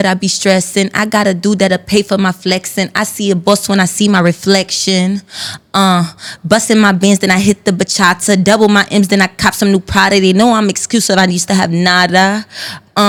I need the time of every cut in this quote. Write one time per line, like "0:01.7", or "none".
none